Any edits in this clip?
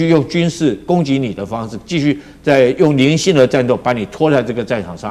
no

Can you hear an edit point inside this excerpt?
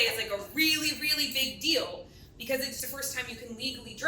yes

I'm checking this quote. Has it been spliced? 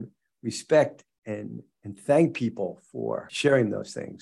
yes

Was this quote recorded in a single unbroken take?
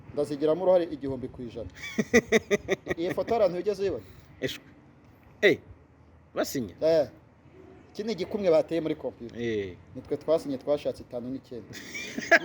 yes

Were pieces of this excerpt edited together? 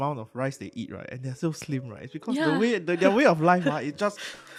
no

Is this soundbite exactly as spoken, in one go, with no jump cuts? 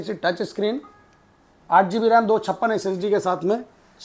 yes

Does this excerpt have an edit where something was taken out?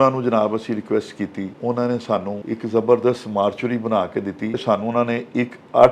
yes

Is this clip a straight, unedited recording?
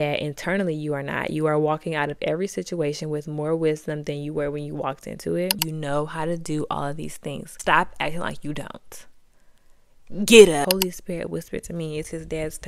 no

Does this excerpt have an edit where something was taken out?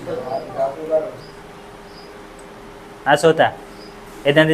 yes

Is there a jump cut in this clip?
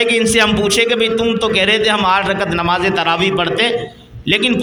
no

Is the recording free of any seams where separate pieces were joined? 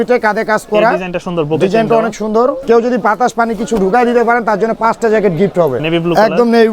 no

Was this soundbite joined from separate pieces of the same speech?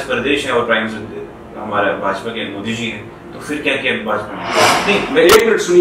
yes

